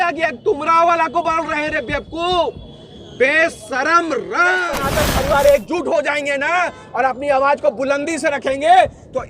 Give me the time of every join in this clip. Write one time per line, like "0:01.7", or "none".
0:04.8